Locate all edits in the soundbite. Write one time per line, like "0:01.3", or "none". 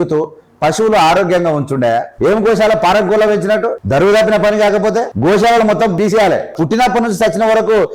0:02.1
0:03.8
0:05.1
0:06.0